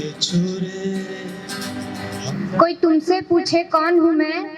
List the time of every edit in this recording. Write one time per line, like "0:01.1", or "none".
0:02.2

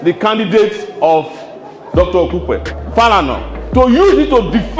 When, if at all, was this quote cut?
0:02.8

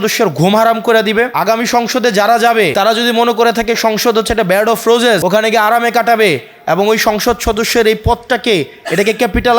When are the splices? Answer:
0:01.3
0:02.7
0:05.2

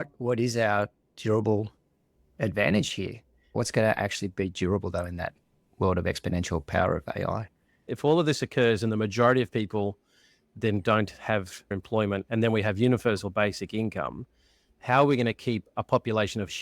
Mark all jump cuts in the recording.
0:03.5
0:07.9
0:11.7

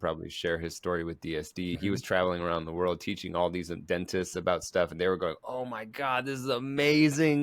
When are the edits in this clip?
0:01.8

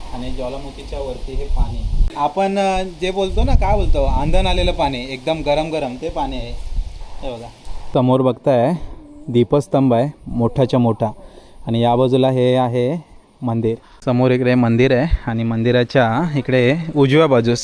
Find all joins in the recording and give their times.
0:02.1
0:07.8
0:13.9

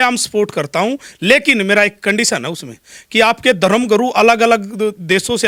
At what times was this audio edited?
none

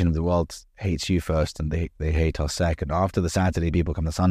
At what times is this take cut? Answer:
none

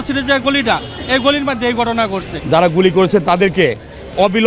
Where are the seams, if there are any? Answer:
0:02.3

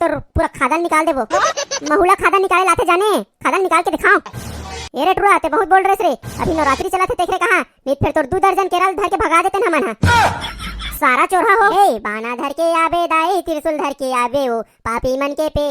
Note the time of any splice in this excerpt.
0:11.7

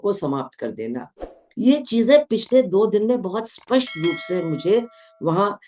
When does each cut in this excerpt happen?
none

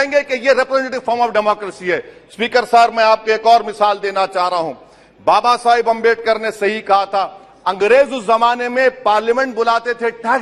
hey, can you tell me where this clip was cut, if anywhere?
none

